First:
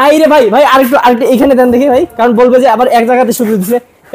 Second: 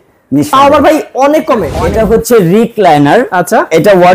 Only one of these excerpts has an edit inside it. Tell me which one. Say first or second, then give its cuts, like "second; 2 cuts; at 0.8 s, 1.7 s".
second; 1 cut; at 1.7 s